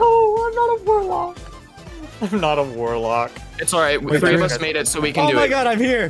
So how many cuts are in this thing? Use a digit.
0